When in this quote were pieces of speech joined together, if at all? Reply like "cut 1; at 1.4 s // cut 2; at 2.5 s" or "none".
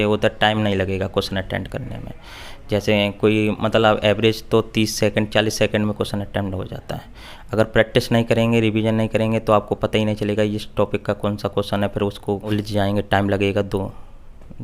cut 1; at 12.5 s